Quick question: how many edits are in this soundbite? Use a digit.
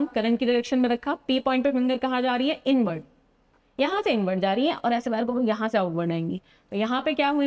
0